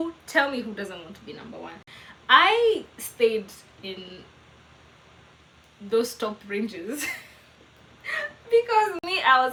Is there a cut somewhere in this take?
no; 0 cuts

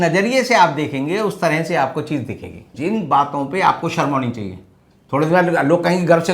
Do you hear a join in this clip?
yes; 1 cut; at 2.7 s

